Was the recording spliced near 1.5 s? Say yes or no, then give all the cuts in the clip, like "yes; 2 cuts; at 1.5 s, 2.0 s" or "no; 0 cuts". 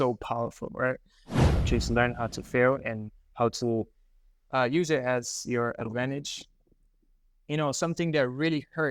yes; 1 cut; at 1.5 s